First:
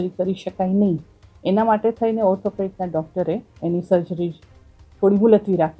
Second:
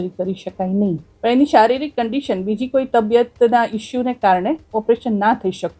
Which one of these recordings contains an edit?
second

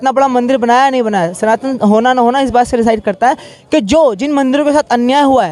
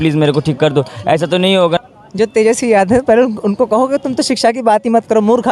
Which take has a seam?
second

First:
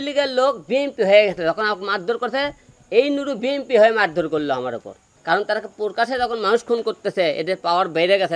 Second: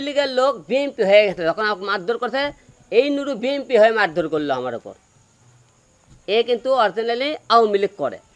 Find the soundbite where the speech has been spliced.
first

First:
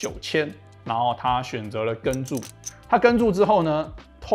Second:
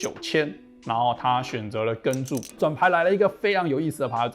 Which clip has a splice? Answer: second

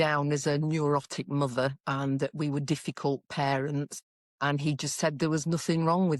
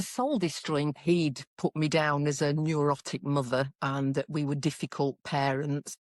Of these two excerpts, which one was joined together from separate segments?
second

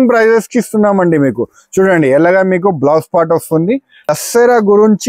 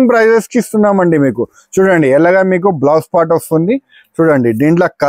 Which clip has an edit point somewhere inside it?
first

